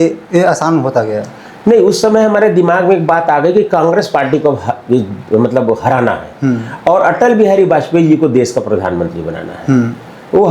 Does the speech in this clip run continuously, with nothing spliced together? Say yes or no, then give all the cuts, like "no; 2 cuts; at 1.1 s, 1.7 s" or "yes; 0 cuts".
yes; 0 cuts